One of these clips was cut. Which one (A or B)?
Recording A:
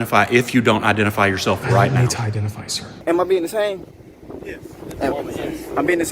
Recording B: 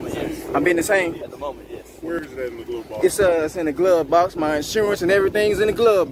A